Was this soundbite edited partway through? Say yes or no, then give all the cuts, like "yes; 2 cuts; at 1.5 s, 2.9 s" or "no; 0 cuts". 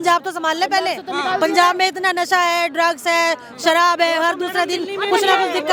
no; 0 cuts